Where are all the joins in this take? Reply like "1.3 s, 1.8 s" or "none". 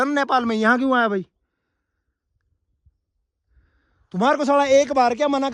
none